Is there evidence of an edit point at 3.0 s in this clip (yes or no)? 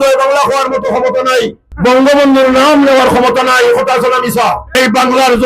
no